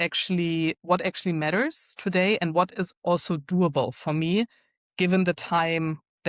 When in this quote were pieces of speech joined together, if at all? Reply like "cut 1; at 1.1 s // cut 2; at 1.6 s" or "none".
none